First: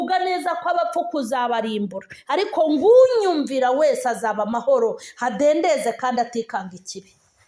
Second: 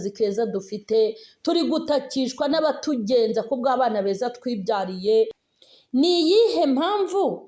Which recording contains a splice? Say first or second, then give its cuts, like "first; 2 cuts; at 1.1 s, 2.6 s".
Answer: second; 1 cut; at 5.4 s